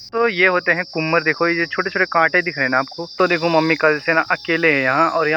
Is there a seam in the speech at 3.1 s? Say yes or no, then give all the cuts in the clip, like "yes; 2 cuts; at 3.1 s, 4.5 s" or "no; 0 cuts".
yes; 1 cut; at 3.1 s